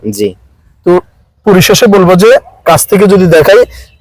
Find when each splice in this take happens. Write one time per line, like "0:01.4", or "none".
none